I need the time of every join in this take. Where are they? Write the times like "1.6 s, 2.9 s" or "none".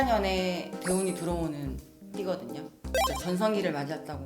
2.7 s